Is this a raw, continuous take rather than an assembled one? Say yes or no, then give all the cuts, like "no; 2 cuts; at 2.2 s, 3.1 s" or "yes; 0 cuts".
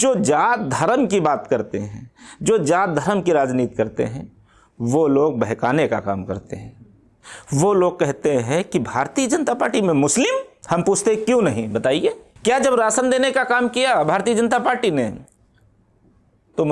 no; 2 cuts; at 10.5 s, 12.3 s